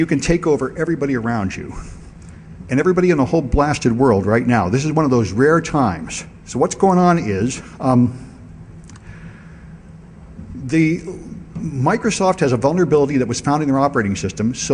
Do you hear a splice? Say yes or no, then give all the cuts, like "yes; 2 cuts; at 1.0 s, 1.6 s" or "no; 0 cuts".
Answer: yes; 1 cut; at 1.1 s